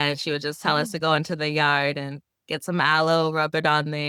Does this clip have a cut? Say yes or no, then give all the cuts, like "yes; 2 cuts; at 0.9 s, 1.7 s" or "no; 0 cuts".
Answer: no; 0 cuts